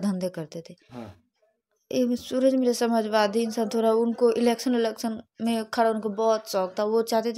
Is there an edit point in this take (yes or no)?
no